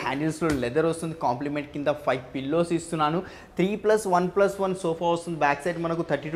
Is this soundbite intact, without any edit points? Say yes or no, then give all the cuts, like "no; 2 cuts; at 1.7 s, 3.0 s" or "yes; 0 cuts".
yes; 0 cuts